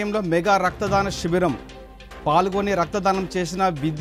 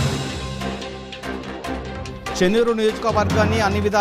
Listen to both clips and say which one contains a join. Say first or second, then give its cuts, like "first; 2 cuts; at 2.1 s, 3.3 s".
second; 1 cut; at 2.4 s